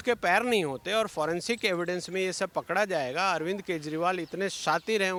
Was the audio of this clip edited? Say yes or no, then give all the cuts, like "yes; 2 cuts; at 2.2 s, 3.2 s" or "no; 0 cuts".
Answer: no; 0 cuts